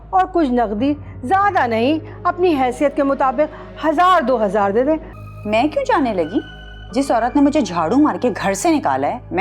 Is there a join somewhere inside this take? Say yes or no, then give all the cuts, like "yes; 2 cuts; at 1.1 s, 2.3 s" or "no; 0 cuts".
yes; 1 cut; at 5.1 s